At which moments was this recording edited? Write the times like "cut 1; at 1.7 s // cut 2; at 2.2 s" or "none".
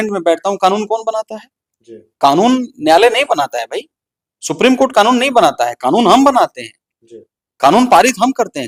none